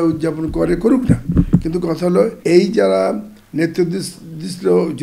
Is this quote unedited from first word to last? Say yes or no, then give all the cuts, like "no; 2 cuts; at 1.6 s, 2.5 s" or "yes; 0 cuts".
no; 1 cut; at 2.4 s